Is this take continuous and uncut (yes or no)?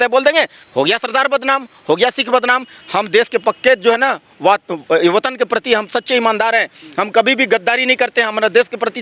yes